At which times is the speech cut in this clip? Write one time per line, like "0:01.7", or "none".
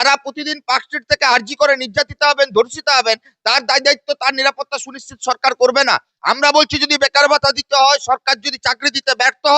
0:06.1